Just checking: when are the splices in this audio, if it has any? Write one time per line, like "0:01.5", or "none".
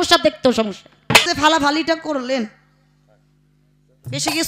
0:01.2